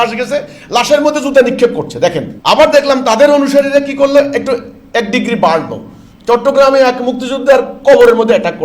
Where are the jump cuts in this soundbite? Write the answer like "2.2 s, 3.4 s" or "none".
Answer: 2.3 s